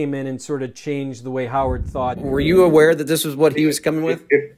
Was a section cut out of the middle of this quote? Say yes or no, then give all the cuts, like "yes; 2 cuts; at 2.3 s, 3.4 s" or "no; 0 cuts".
yes; 1 cut; at 2.2 s